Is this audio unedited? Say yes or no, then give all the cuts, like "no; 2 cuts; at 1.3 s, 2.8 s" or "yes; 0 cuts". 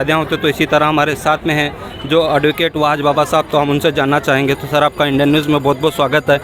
yes; 0 cuts